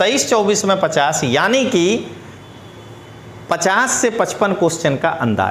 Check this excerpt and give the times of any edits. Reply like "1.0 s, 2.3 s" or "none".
none